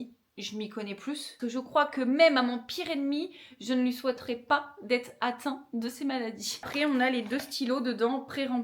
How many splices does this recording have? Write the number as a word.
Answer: two